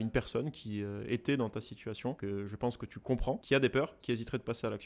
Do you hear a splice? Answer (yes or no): yes